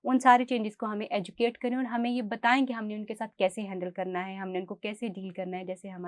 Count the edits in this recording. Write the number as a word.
zero